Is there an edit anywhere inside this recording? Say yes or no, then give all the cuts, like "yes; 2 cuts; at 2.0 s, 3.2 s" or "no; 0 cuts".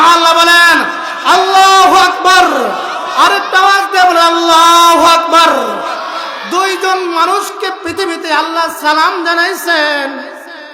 no; 0 cuts